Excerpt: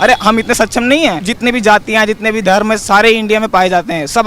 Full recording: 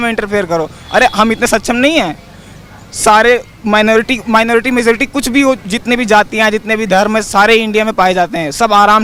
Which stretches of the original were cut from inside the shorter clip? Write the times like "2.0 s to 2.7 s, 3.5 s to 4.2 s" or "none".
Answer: 2.2 s to 5.7 s